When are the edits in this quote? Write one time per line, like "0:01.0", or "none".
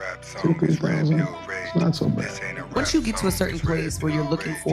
0:02.8